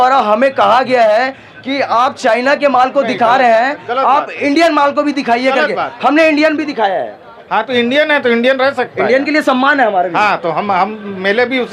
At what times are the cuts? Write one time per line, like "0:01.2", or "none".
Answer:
none